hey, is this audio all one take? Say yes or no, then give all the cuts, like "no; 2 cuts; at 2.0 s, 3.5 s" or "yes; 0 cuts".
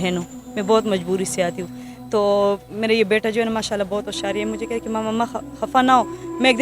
yes; 0 cuts